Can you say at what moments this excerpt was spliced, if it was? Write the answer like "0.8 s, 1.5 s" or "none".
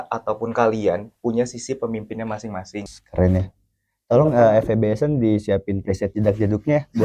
3.0 s